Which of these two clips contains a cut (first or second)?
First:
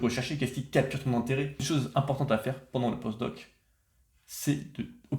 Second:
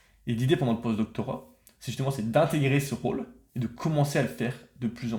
first